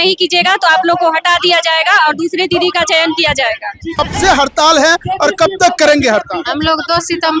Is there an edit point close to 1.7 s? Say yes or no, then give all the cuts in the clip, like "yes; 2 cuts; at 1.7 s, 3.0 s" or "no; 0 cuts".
no; 1 cut; at 4.0 s